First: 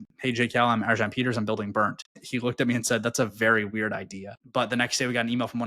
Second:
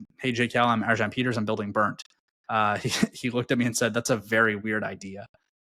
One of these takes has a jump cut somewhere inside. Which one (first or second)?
first